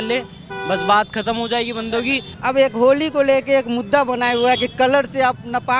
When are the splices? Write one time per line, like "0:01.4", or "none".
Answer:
0:02.3